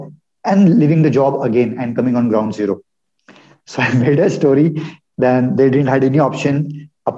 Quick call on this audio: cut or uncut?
uncut